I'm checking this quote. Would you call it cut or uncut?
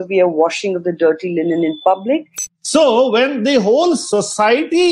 cut